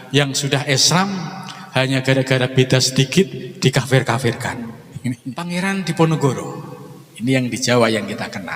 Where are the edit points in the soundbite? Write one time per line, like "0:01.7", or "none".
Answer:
0:05.3